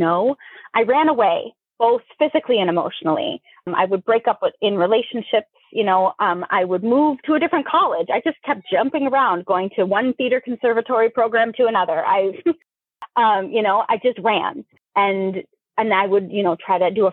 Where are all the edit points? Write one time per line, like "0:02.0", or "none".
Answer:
0:14.7